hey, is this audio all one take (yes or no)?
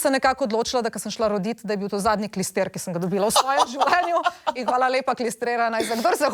yes